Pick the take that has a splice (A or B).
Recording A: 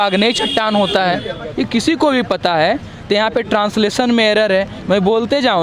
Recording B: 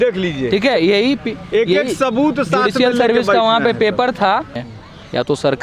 B